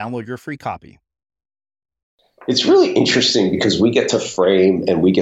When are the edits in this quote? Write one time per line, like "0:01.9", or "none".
0:02.4